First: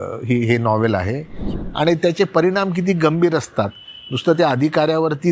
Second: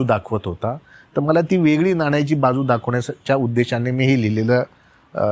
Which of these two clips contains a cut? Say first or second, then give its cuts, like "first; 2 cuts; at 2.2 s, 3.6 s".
first; 1 cut; at 1.5 s